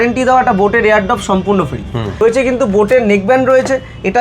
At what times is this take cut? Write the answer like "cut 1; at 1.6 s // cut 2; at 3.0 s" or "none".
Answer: cut 1; at 2.2 s